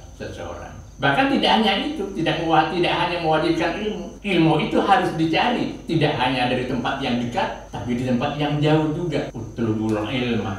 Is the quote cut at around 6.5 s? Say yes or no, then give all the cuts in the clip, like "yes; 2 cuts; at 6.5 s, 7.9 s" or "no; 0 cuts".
no; 4 cuts; at 0.8 s, 4.1 s, 7.7 s, 9.4 s